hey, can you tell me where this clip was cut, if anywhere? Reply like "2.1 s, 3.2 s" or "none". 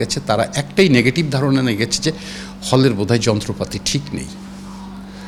none